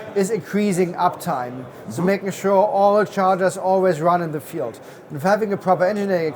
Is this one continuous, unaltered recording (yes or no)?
yes